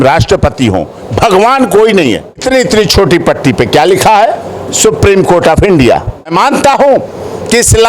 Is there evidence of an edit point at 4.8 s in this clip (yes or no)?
no